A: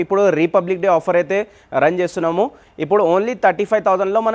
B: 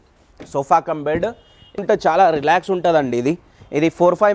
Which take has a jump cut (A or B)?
B